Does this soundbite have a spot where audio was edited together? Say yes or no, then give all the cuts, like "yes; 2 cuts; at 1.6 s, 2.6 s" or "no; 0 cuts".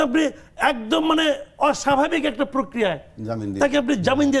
no; 0 cuts